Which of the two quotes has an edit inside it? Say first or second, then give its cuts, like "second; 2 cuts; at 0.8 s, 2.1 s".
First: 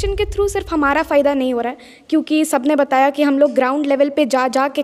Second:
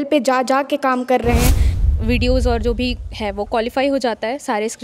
second; 1 cut; at 1.7 s